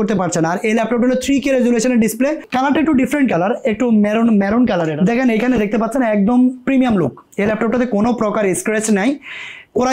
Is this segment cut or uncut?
cut